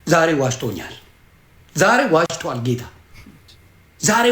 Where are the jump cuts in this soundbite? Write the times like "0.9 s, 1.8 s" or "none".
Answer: none